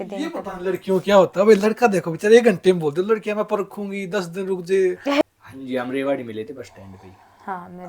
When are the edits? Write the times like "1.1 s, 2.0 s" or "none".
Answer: 5.2 s